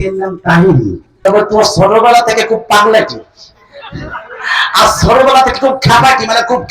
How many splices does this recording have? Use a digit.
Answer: 1